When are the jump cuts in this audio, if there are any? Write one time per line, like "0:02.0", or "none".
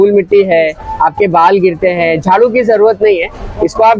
none